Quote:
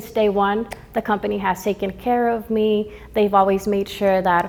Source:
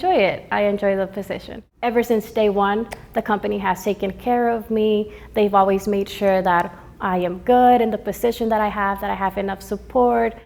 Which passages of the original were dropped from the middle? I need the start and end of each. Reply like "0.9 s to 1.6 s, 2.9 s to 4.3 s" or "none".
none